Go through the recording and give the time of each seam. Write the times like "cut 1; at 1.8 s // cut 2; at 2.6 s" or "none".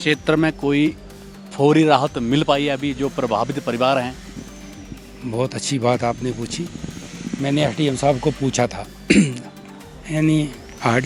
none